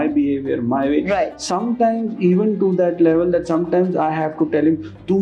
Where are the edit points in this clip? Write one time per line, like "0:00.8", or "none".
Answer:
none